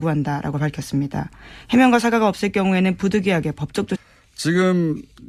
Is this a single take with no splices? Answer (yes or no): yes